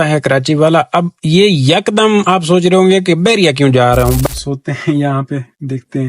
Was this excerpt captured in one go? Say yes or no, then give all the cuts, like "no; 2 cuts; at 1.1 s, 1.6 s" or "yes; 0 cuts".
no; 1 cut; at 4.2 s